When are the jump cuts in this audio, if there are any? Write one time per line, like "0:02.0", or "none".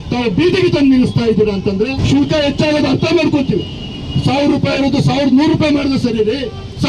0:02.0